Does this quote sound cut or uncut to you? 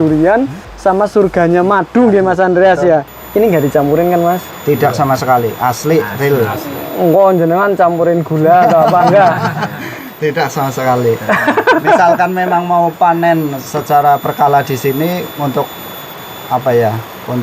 cut